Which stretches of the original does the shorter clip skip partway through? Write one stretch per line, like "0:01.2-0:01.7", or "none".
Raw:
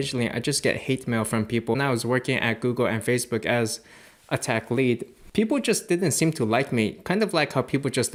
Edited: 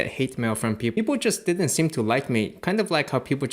0:01.7-0:05.4